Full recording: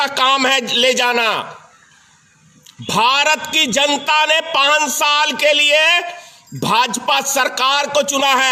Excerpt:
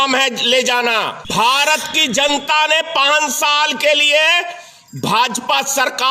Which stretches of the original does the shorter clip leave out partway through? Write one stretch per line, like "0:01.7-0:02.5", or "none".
0:01.5-0:02.8